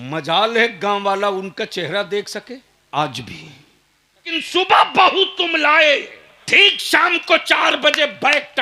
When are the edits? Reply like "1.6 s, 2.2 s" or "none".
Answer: 2.7 s, 4.3 s, 6.4 s